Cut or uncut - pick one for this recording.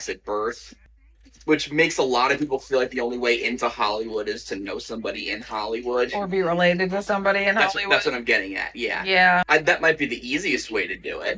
cut